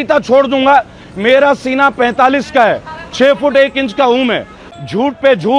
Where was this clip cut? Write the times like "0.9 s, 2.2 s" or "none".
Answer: 4.6 s